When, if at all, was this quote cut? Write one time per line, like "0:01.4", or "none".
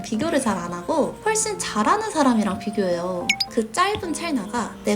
0:03.3